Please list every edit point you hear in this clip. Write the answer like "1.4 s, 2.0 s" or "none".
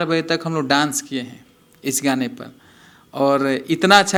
none